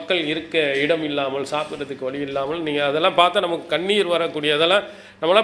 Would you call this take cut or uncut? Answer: uncut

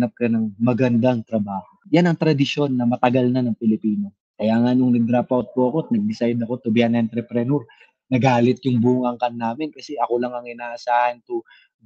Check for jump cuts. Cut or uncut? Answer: uncut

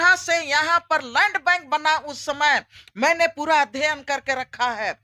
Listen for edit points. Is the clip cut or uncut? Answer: uncut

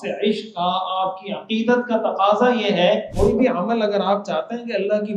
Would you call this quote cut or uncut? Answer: cut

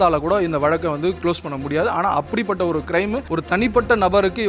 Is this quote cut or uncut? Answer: cut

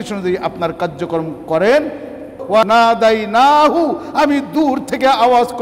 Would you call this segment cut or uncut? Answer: cut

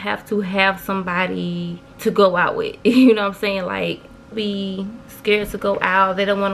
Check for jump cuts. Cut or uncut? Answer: cut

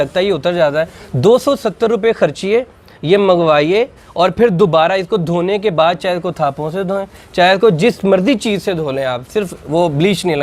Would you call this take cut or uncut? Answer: uncut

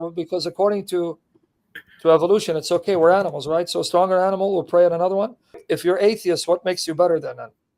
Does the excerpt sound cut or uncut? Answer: cut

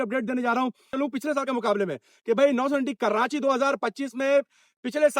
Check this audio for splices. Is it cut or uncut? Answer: cut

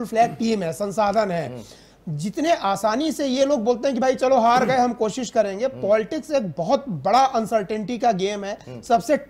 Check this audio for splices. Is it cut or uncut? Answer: uncut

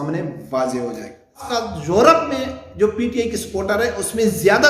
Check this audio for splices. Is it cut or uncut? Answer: cut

